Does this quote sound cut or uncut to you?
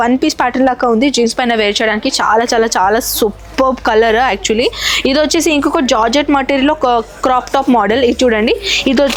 uncut